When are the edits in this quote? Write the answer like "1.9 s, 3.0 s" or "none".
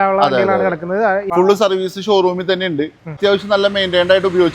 1.2 s, 3.2 s